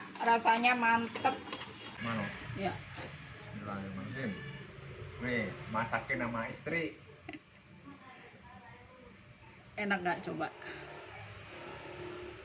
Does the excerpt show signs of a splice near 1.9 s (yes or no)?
yes